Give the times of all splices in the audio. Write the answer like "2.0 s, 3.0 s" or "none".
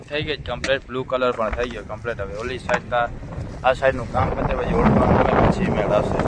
none